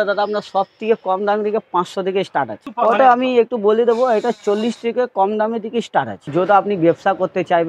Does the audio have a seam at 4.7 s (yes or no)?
no